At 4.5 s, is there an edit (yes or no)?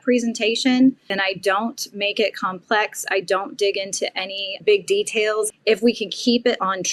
yes